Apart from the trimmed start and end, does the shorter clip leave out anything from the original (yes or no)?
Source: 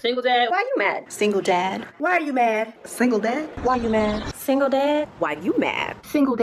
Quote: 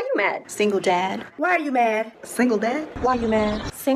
no